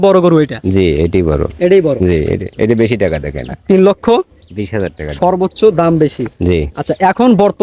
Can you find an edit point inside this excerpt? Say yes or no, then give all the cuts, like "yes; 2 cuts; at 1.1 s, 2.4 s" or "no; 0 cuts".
no; 0 cuts